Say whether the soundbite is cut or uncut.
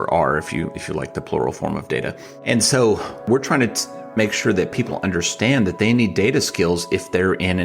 cut